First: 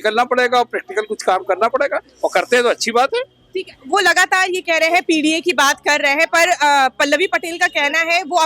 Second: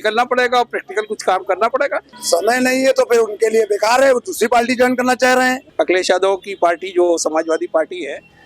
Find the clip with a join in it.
second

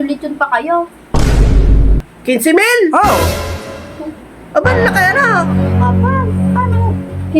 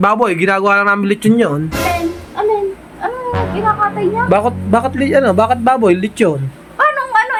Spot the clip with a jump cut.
first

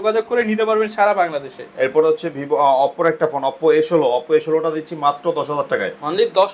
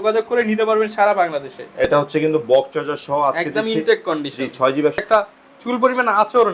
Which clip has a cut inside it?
second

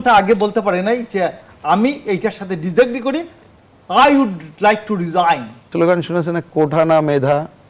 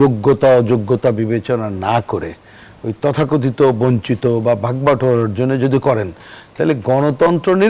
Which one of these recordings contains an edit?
first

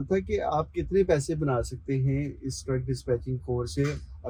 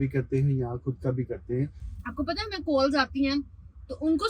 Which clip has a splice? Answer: second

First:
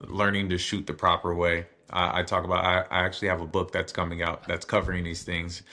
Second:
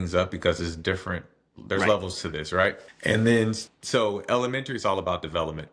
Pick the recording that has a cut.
second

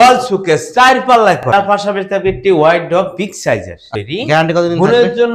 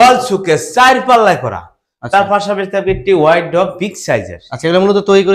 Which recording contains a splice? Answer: first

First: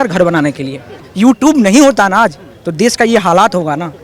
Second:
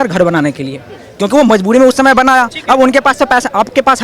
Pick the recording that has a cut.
first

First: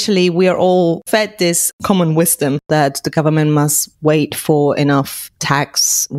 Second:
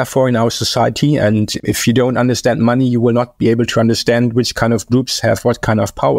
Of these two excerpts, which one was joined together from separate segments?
first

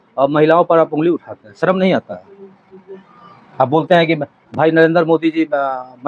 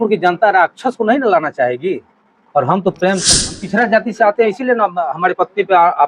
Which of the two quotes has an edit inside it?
second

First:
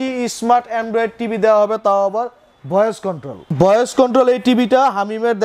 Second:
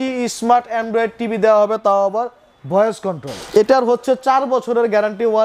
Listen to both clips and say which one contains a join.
second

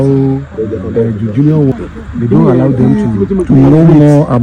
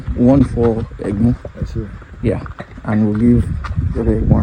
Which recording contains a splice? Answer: first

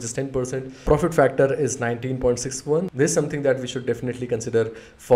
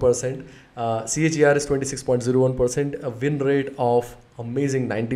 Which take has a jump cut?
first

